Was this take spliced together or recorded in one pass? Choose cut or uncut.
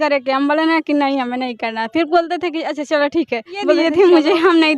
cut